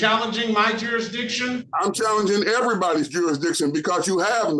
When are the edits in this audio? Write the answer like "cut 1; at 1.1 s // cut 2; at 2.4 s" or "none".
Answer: none

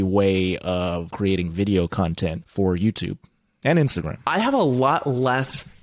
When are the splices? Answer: cut 1; at 1.1 s // cut 2; at 2.4 s // cut 3; at 4.1 s

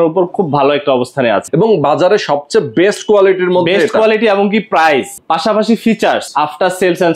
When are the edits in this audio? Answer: cut 1; at 1.5 s // cut 2; at 5.2 s // cut 3; at 6.2 s

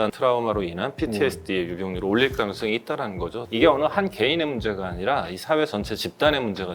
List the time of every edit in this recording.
cut 1; at 3.4 s

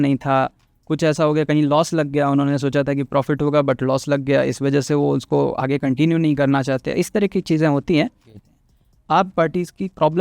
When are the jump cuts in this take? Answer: cut 1; at 8.5 s

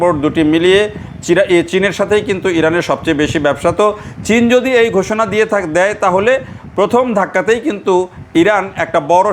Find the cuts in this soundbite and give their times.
none

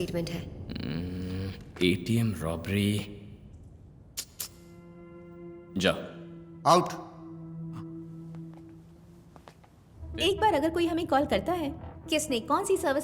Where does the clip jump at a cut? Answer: cut 1; at 10.0 s

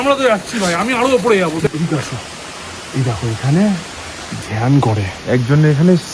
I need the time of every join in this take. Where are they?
cut 1; at 1.7 s

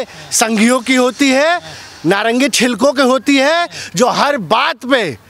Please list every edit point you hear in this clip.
none

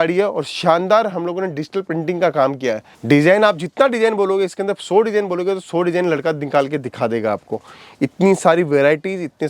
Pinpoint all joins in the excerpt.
cut 1; at 2.9 s

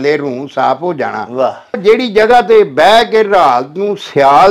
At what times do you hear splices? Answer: cut 1; at 1.8 s

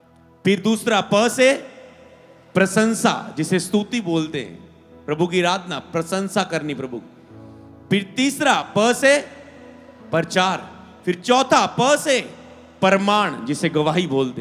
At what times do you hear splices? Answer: none

